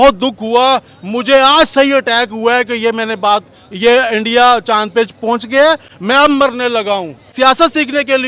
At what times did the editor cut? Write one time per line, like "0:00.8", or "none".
0:07.2

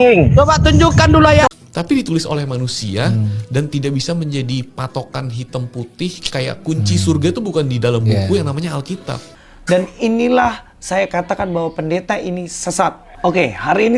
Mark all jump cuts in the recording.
0:01.5

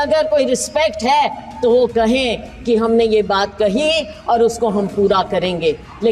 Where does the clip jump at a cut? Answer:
none

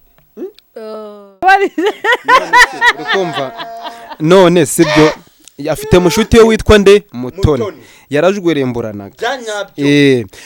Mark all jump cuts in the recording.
0:01.4

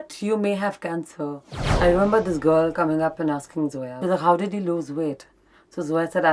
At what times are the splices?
0:01.6
0:03.9

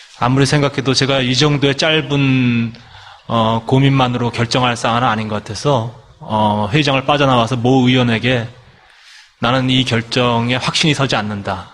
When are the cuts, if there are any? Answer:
0:02.2

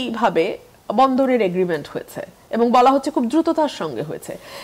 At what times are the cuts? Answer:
none

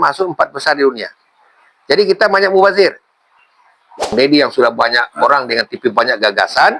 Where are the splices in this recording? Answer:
0:04.1

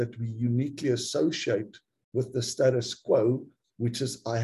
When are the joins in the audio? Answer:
none

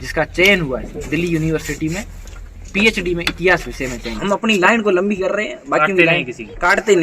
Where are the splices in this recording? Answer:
0:04.1

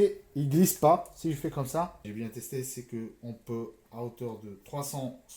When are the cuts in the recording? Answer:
0:02.1

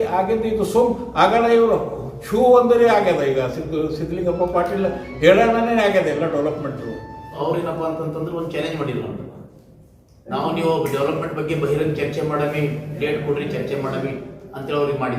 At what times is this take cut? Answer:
0:07.4

